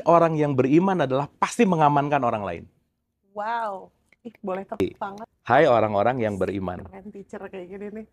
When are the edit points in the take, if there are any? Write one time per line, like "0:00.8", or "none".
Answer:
0:04.8